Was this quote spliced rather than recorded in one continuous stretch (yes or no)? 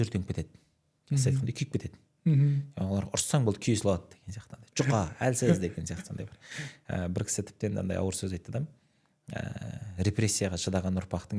no